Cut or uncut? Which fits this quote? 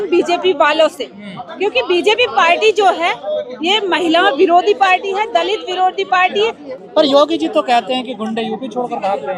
uncut